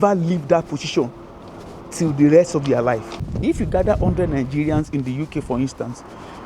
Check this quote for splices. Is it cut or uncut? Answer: cut